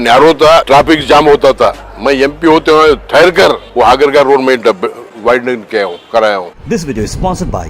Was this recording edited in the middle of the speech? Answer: yes; 3 cuts; at 3.6 s, 5.1 s, 6.5 s

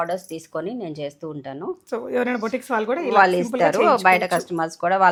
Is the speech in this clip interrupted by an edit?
no; 0 cuts

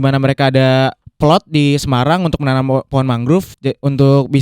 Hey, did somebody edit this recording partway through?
yes; 2 cuts; at 1.0 s, 3.5 s

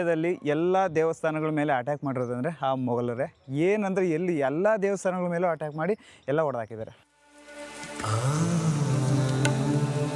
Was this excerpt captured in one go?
yes; 0 cuts

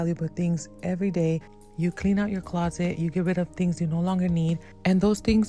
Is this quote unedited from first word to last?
no; 1 cut; at 1.5 s

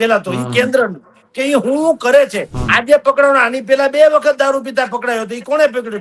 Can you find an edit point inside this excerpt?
yes; 1 cut; at 2.6 s

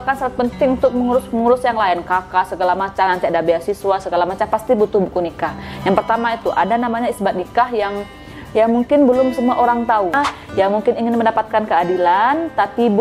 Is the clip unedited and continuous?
no; 1 cut; at 10.1 s

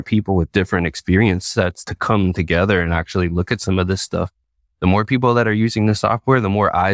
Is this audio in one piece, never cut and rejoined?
yes; 0 cuts

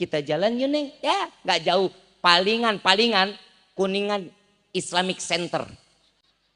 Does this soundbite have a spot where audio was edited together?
no; 0 cuts

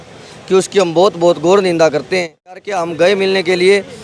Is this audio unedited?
no; 1 cut; at 2.5 s

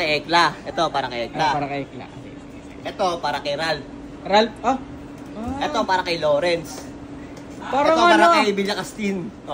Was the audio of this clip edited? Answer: no; 0 cuts

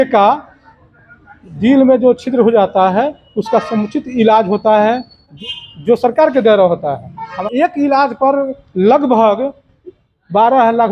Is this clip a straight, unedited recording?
no; 2 cuts; at 5.4 s, 7.4 s

